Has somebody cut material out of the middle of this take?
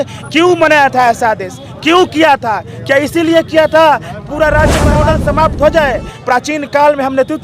yes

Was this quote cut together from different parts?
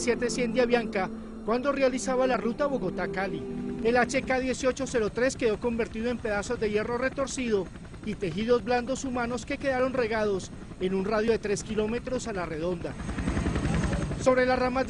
yes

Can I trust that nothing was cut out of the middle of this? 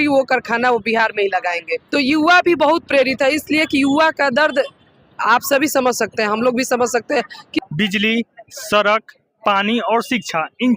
no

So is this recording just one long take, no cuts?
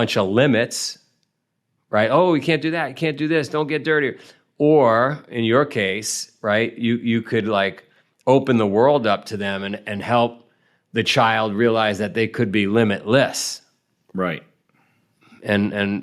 yes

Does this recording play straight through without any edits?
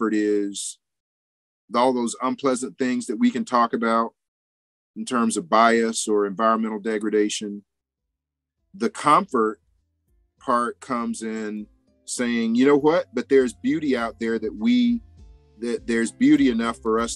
yes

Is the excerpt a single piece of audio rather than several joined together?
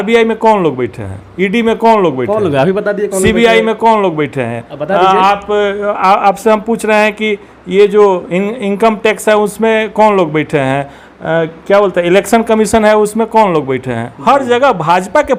yes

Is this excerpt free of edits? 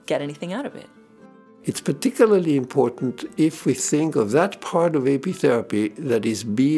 no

